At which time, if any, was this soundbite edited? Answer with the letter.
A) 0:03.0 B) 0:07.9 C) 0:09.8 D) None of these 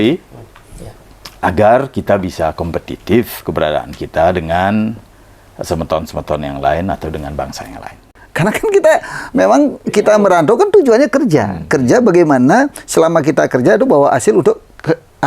B